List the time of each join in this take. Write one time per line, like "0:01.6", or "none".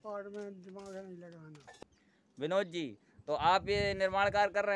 0:01.7